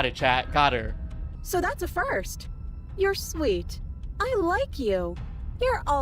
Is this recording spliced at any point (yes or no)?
yes